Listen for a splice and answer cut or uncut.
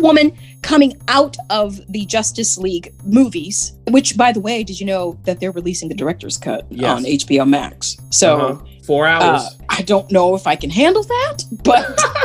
cut